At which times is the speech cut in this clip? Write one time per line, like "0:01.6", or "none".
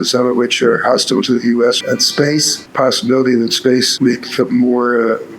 0:02.1
0:03.9